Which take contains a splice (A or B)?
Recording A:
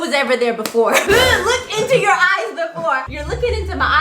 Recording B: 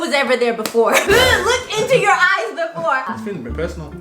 B